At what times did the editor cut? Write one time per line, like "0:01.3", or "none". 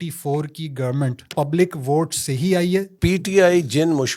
0:01.2
0:03.0